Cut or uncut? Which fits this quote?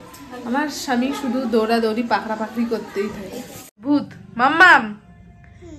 cut